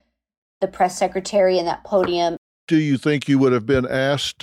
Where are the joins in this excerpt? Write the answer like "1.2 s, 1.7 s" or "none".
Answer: 2.4 s